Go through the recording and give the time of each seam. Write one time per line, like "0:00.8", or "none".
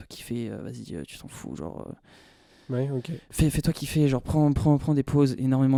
none